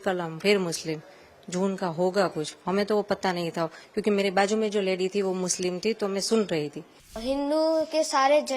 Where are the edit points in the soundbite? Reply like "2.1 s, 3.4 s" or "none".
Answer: 7.2 s